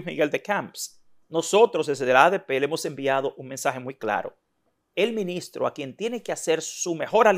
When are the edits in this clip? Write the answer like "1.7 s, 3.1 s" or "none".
none